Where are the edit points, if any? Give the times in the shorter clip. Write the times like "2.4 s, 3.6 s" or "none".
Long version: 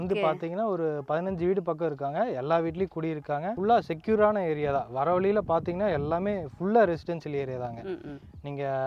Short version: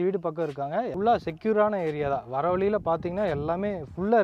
0.9 s

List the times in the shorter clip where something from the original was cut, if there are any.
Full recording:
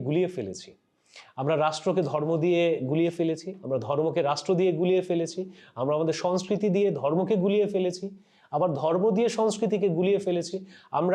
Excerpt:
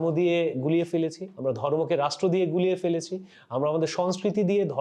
none

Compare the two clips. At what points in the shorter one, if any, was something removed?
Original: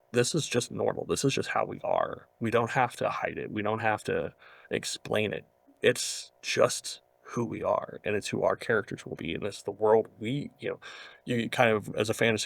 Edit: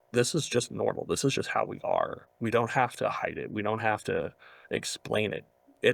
none

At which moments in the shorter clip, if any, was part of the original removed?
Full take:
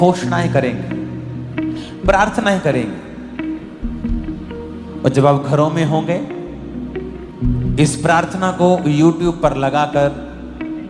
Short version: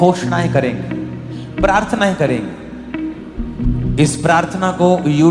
1.4 s, 3.5 s

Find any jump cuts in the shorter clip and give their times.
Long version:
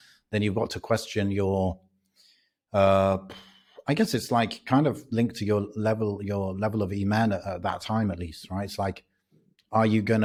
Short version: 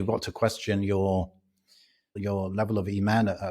2.2 s

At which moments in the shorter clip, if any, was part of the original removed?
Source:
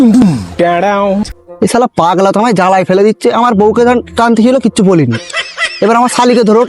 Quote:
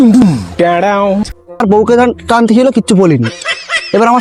1.6 s

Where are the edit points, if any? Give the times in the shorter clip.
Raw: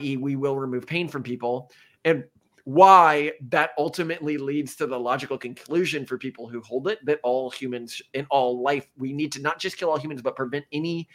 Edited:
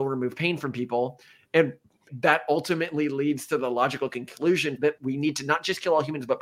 2.0 s, 4.9 s

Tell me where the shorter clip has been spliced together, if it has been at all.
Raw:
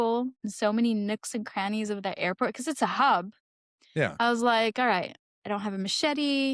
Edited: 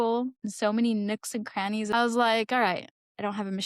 1.9 s

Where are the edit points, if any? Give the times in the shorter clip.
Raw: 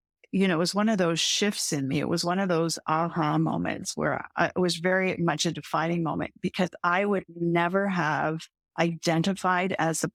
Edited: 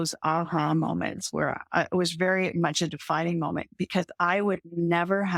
none

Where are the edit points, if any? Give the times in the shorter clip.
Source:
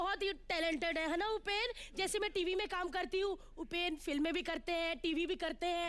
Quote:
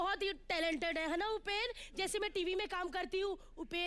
none

